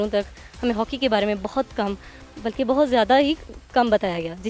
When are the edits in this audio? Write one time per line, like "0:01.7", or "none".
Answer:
none